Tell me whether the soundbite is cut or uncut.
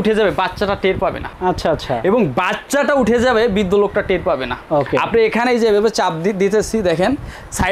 cut